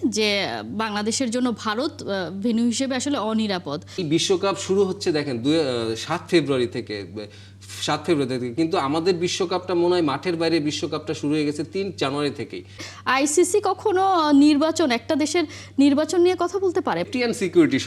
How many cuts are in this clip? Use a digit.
3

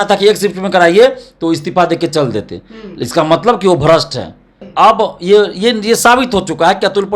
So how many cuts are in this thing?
1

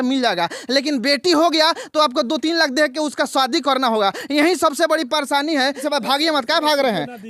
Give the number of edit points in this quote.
1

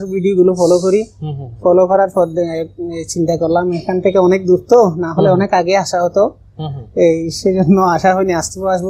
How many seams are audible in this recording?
0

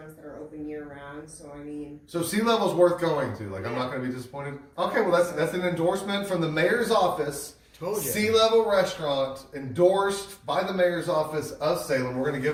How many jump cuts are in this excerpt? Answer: 0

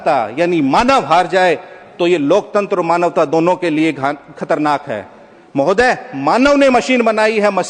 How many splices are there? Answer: 0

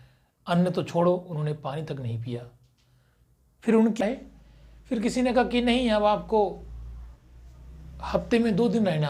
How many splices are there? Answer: 1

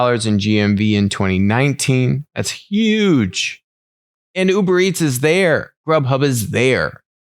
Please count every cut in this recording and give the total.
0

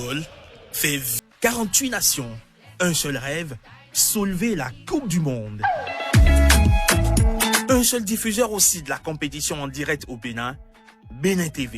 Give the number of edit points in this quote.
1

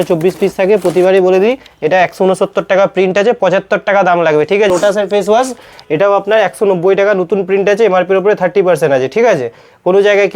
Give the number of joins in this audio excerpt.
1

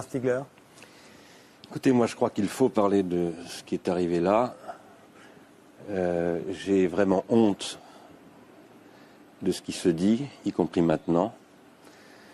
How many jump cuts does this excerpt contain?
0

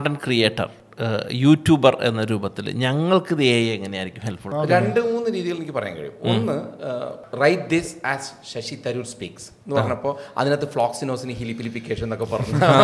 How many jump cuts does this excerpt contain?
2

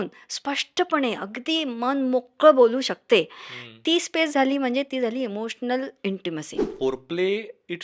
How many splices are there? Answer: 1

